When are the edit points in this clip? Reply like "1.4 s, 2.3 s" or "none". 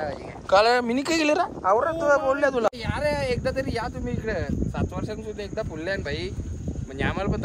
2.7 s